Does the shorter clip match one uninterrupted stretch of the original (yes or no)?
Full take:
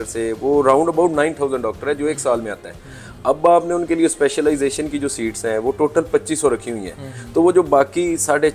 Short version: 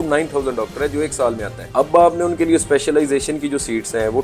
no